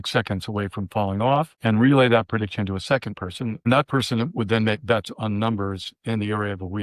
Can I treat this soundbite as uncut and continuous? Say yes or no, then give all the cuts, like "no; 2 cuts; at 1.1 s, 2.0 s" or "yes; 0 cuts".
no; 2 cuts; at 1.5 s, 3.7 s